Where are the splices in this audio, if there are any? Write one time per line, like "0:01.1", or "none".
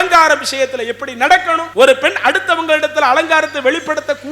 0:01.6